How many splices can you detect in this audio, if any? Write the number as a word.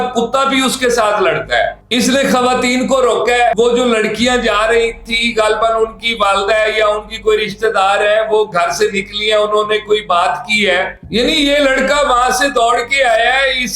two